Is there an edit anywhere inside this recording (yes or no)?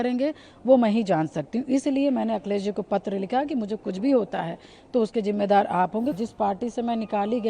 yes